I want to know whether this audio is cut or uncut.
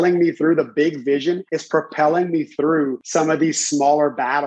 cut